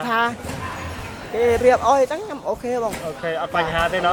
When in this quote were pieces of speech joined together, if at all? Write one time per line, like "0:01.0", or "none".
none